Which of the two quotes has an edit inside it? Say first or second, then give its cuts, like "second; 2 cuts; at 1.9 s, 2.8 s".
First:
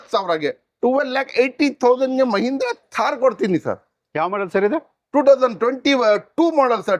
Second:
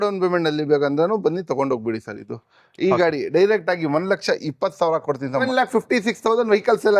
second; 1 cut; at 5.4 s